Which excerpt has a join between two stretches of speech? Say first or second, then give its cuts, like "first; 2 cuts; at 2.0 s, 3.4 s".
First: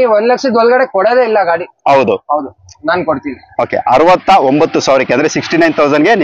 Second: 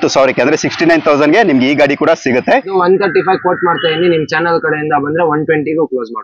second; 1 cut; at 2.7 s